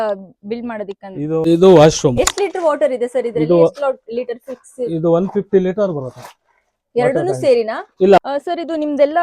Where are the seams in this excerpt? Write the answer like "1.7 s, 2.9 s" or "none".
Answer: 1.4 s, 8.2 s